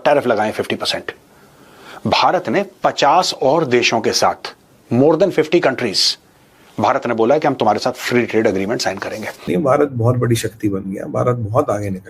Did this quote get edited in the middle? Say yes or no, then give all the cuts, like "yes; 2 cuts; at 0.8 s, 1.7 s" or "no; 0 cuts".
no; 0 cuts